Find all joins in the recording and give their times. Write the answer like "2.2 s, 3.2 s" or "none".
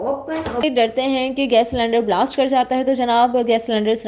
0.9 s